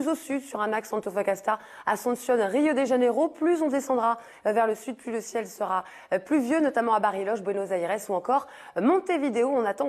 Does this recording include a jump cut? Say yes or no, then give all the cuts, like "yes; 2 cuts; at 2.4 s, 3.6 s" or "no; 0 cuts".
no; 0 cuts